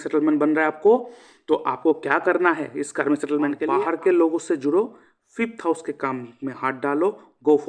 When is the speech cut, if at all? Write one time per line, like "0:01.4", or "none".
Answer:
0:03.6